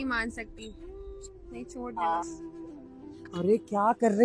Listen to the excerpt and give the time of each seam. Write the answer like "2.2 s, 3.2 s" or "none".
none